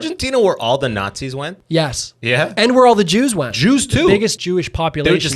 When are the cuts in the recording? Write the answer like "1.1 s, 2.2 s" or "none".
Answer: 1.5 s, 3.5 s, 4.4 s